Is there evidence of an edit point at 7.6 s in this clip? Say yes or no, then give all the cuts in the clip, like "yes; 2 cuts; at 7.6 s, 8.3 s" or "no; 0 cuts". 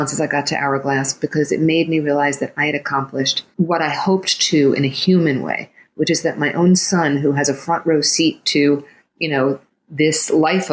no; 1 cut; at 3.4 s